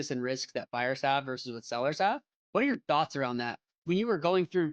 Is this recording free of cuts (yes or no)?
no